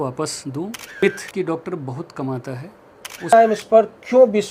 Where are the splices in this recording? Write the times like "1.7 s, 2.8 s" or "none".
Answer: 1.0 s, 3.3 s